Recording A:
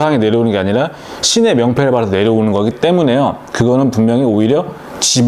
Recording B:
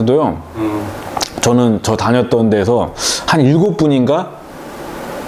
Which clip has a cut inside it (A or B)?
A